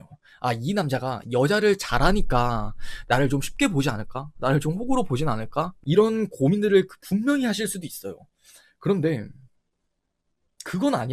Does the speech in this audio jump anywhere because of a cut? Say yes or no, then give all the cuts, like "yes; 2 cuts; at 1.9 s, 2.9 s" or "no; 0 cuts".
yes; 1 cut; at 5.7 s